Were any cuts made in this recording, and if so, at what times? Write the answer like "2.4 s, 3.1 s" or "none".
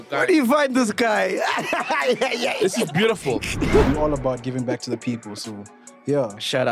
3.9 s